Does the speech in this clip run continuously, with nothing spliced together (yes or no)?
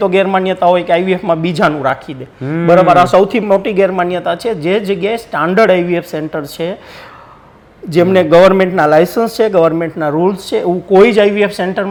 yes